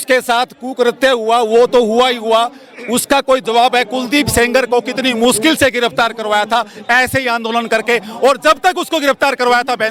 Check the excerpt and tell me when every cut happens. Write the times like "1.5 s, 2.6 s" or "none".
none